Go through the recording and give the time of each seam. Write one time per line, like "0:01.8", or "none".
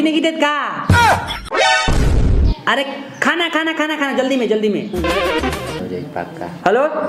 0:05.8